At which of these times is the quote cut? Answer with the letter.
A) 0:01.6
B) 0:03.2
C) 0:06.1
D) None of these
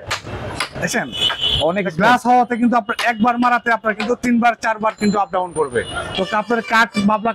C